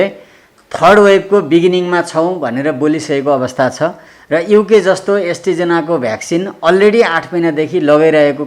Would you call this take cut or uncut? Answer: uncut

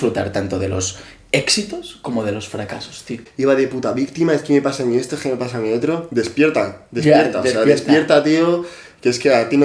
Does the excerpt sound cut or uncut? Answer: cut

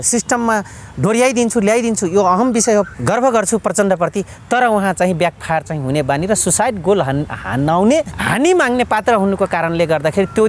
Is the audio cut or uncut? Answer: cut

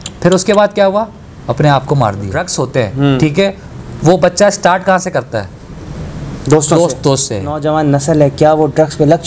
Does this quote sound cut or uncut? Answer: cut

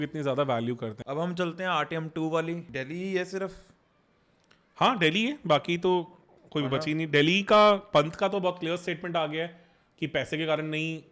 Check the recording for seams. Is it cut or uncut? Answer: cut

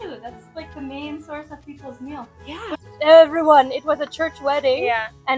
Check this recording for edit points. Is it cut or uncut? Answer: cut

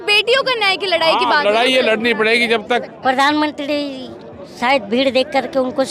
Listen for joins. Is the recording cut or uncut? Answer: cut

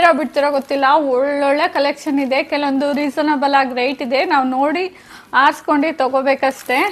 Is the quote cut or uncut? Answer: uncut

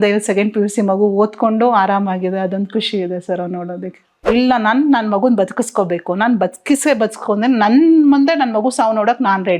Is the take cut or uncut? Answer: cut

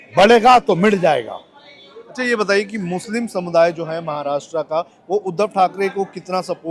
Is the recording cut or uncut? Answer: uncut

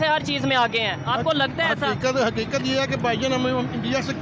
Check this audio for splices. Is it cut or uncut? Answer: uncut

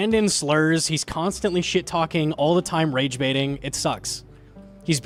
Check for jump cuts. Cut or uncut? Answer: uncut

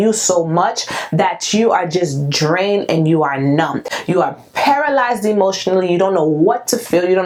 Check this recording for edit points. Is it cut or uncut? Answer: uncut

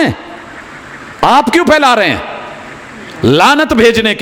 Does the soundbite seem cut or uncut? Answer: uncut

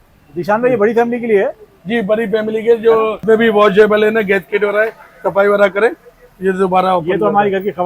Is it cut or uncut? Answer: cut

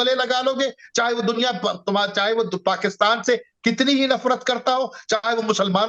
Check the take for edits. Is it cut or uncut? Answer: uncut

